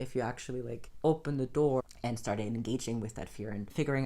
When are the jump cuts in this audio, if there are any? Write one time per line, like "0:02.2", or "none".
0:01.8